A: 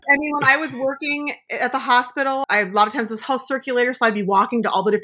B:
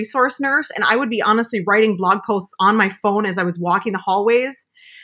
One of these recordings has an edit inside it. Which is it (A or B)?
A